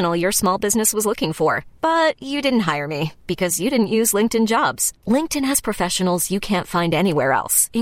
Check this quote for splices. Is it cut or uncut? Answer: uncut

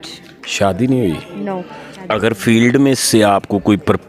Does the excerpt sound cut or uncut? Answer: cut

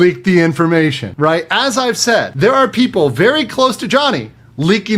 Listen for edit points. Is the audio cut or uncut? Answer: cut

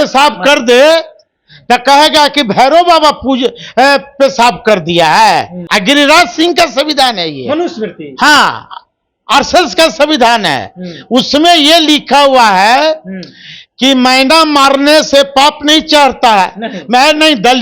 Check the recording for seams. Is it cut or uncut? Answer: cut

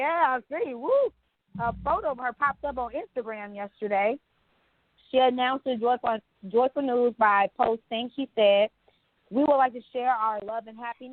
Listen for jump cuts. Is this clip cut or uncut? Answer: uncut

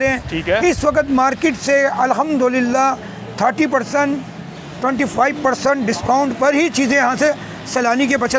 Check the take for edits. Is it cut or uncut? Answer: uncut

